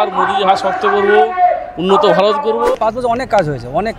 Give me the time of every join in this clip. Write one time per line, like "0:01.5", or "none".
0:02.7